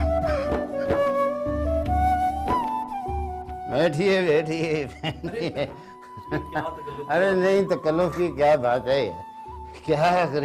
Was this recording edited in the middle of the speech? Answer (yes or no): no